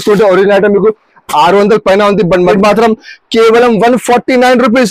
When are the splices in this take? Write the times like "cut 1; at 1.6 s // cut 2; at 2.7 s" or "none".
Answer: cut 1; at 2.5 s